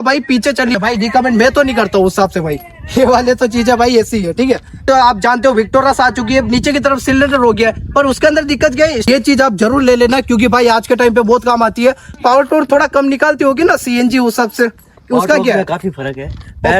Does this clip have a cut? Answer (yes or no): yes